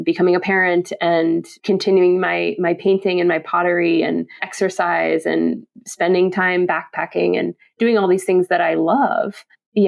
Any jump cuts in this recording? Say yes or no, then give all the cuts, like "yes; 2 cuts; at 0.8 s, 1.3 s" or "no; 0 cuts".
yes; 2 cuts; at 1.5 s, 4.5 s